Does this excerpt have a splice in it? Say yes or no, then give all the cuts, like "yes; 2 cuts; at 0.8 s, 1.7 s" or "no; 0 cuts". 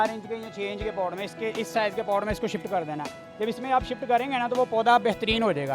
no; 0 cuts